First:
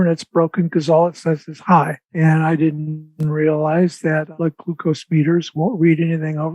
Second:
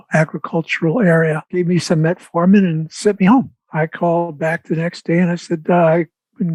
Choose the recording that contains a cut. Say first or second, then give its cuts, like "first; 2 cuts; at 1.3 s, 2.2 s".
first; 2 cuts; at 2.2 s, 4.3 s